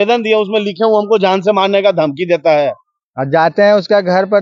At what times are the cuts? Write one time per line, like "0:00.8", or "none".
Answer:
none